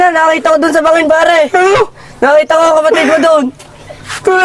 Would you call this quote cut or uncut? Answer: uncut